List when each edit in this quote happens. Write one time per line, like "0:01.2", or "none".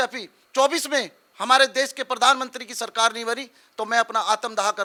none